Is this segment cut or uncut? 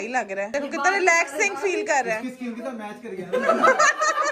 uncut